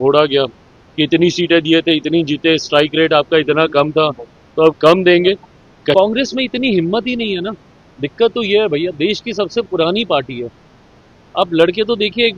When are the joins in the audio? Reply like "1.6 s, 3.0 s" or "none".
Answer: 5.9 s